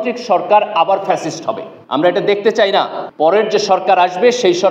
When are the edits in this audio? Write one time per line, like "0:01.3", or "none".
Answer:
0:01.7
0:03.0